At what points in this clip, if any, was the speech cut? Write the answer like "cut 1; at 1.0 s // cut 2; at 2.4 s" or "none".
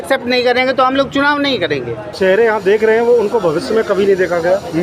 cut 1; at 2.1 s